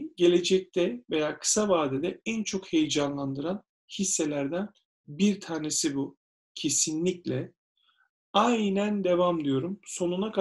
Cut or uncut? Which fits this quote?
uncut